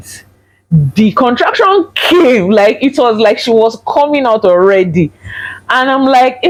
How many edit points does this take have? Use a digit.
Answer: 0